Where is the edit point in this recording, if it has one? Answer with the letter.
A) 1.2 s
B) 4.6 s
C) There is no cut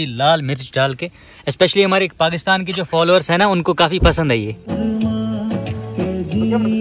B